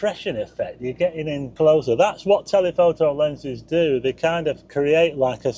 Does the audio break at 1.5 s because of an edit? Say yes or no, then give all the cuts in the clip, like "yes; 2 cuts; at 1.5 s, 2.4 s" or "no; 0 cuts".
yes; 1 cut; at 1.5 s